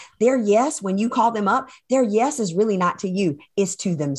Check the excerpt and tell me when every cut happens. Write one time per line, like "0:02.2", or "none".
none